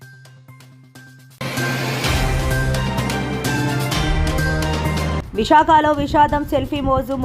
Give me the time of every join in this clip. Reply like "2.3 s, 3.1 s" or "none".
1.2 s, 5.2 s